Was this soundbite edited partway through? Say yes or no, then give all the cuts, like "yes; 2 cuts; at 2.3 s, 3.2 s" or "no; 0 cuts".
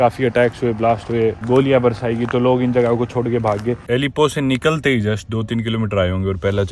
yes; 2 cuts; at 1.4 s, 3.9 s